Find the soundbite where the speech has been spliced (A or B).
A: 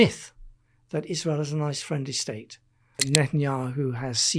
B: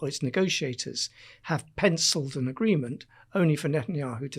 A